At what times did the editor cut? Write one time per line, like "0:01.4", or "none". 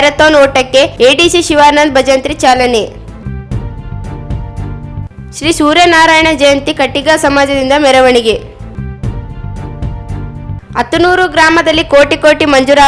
0:03.2
0:05.1
0:08.6
0:10.4